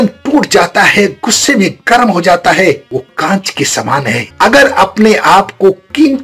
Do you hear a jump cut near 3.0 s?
no; 1 cut; at 4.3 s

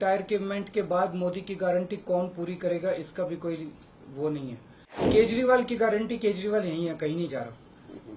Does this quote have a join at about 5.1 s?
yes; 1 cut; at 5.1 s

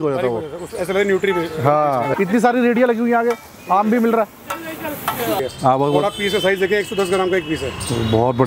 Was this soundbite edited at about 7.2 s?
no; 2 cuts; at 2.1 s, 5.4 s

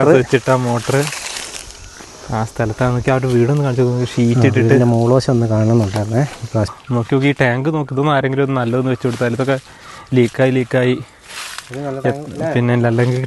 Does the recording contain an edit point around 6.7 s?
yes; 1 cut; at 6.7 s

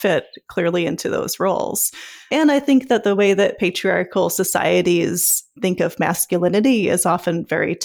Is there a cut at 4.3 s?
no; 2 cuts; at 2.3 s, 5.5 s

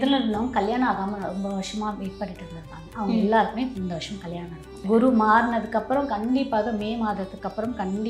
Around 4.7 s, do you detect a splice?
yes; 1 cut; at 4.7 s

